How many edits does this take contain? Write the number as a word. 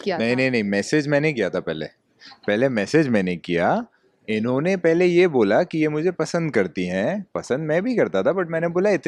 zero